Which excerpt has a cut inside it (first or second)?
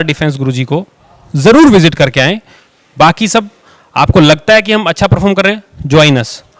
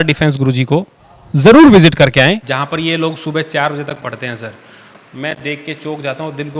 second